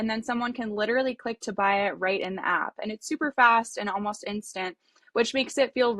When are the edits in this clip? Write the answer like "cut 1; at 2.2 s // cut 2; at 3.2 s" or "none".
none